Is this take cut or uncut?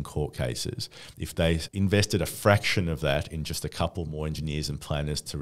cut